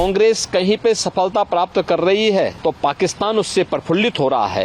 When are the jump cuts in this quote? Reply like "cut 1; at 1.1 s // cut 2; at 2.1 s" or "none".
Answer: cut 1; at 2.5 s